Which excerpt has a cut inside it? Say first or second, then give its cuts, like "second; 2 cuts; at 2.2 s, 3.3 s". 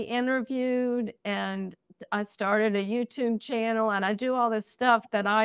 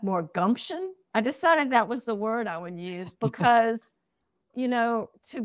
second; 2 cuts; at 1.0 s, 4.5 s